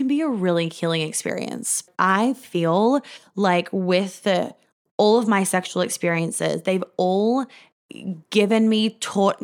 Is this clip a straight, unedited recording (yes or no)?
no